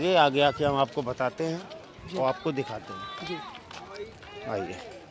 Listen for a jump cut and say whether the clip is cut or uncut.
uncut